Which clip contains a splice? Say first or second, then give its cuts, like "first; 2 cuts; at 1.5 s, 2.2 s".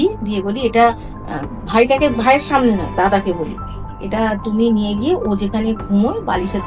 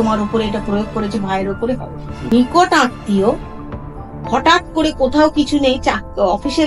second; 1 cut; at 2.3 s